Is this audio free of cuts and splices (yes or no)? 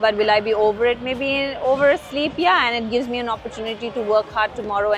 yes